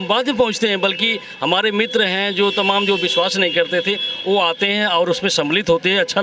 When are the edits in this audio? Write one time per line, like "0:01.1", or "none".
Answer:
none